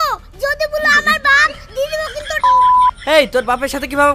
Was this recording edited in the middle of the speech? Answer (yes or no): no